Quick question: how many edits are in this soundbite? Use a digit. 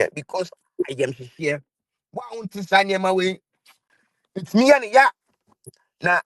0